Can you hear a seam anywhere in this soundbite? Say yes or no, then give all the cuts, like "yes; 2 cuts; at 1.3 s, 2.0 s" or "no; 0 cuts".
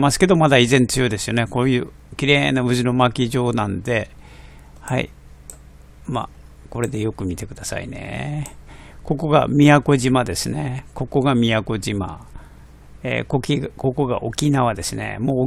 no; 0 cuts